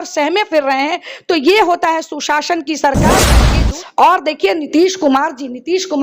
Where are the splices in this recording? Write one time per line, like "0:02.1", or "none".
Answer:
0:03.4